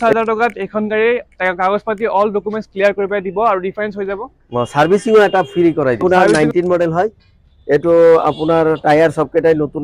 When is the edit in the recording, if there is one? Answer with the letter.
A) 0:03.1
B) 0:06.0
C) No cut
B